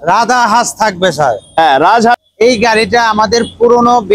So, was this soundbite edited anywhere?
yes; 1 cut; at 2.3 s

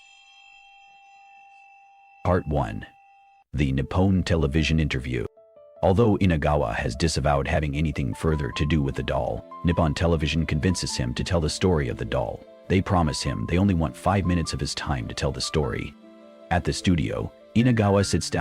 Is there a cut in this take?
yes; 1 cut; at 2.2 s

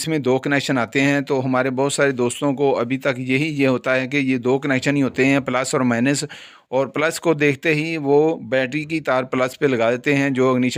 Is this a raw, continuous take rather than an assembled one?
yes; 0 cuts

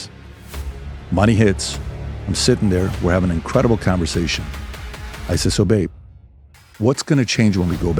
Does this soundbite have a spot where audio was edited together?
no; 0 cuts

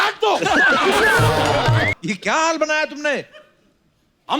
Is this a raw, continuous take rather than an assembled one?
no; 1 cut; at 1.9 s

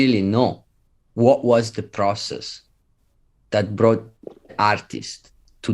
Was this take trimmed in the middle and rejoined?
yes; 1 cut; at 1.0 s

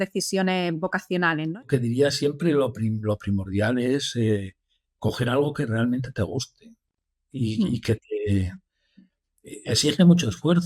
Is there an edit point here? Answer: yes; 1 cut; at 1.6 s

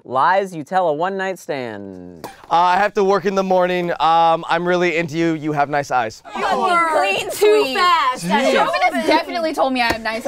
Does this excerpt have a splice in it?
yes; 2 cuts; at 6.6 s, 8.5 s

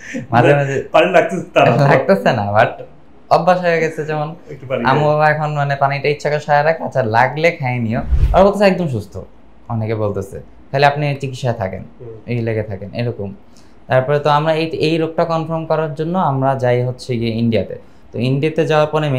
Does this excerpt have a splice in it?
yes; 1 cut; at 8.1 s

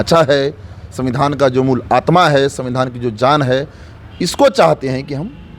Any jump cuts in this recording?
no; 0 cuts

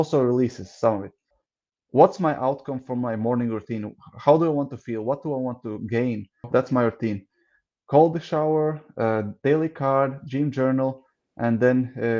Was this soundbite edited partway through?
yes; 2 cuts; at 1.3 s, 6.4 s

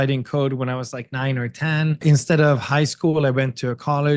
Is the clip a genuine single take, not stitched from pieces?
no; 1 cut; at 2.0 s

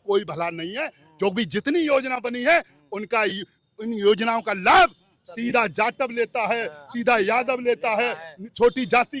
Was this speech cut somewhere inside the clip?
no; 0 cuts

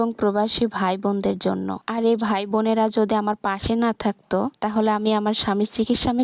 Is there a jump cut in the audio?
no; 0 cuts

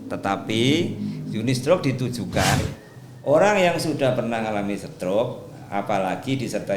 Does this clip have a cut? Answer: yes; 1 cut; at 2.6 s

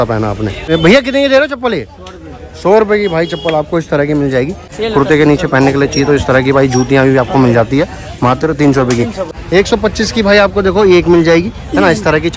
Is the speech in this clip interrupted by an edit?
yes; 3 cuts; at 0.7 s, 4.7 s, 9.2 s

